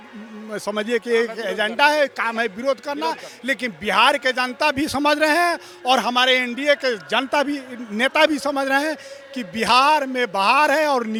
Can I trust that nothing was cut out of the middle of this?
yes; 0 cuts

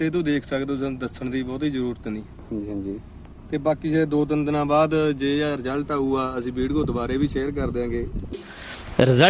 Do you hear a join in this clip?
yes; 1 cut; at 8.3 s

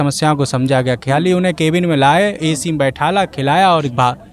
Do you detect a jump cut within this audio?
no; 0 cuts

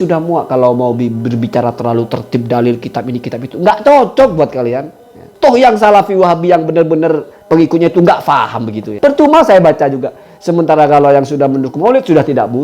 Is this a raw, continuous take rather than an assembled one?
no; 2 cuts; at 5.5 s, 9.0 s

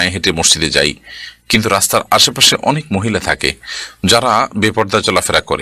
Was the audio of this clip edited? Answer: no; 0 cuts

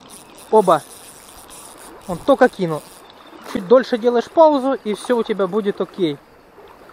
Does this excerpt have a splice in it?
no; 0 cuts

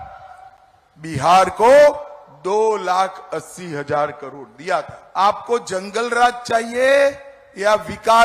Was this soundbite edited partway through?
yes; 1 cut; at 5.0 s

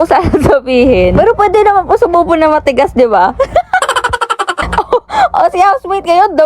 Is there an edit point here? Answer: yes; 1 cut; at 4.7 s

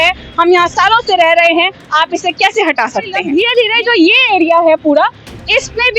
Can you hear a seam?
yes; 1 cut; at 3.2 s

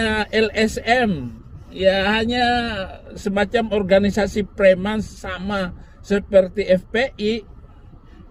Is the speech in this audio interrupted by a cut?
no; 0 cuts

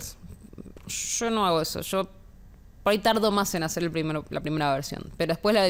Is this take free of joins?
yes; 0 cuts

